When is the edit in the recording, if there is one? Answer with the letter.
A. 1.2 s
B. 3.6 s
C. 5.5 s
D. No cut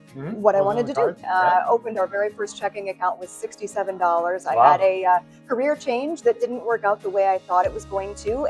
A